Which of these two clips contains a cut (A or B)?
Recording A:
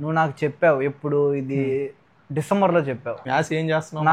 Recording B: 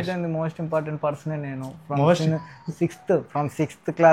A